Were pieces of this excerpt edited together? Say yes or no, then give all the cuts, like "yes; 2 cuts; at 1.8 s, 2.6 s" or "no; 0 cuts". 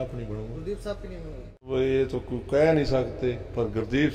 yes; 1 cut; at 1.7 s